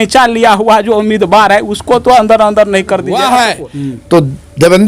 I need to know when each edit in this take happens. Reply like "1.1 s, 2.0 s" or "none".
3.2 s